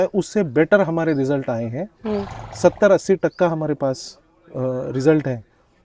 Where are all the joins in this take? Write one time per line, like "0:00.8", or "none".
none